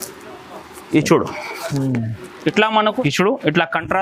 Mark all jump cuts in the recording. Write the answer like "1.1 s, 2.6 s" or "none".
2.9 s